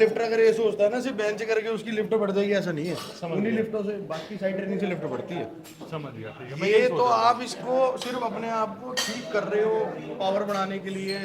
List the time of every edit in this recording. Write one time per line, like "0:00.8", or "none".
none